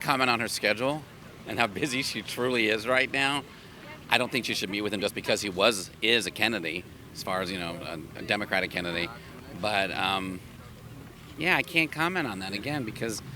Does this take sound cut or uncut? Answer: uncut